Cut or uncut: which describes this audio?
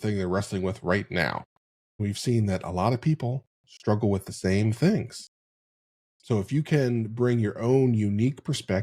cut